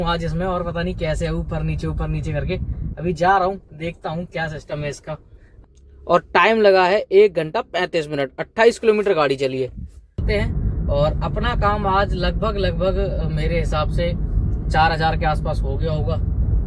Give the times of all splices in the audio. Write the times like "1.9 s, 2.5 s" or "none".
5.5 s, 10.2 s